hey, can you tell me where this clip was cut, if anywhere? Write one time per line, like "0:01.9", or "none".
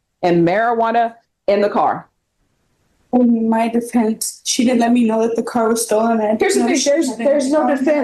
none